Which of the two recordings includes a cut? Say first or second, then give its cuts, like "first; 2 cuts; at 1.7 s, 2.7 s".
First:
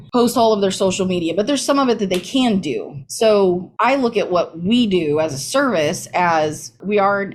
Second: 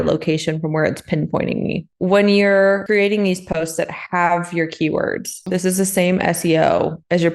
second; 3 cuts; at 1.9 s, 2.8 s, 5.4 s